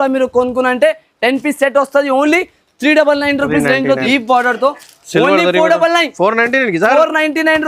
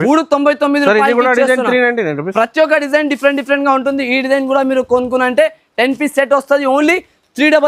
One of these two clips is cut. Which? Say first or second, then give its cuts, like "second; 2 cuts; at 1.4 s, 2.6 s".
first; 1 cut; at 4.0 s